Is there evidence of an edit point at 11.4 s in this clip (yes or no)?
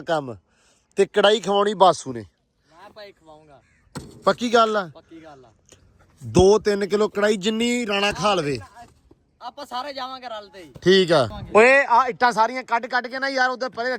yes